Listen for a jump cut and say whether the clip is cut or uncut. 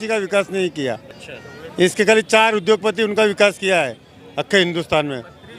uncut